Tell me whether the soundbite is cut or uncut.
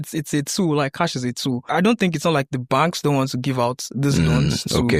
cut